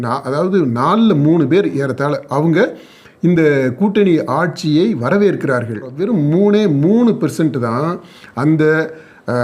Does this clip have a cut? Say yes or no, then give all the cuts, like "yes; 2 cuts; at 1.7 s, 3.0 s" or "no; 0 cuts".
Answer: yes; 1 cut; at 5.9 s